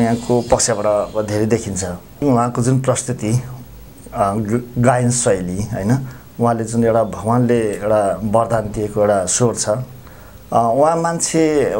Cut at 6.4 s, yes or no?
no